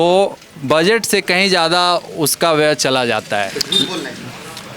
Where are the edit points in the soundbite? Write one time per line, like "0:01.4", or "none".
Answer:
0:03.5